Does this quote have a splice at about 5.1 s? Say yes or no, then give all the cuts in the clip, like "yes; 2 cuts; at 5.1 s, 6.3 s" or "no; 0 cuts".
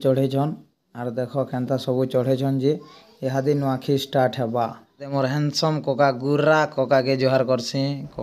yes; 1 cut; at 5.1 s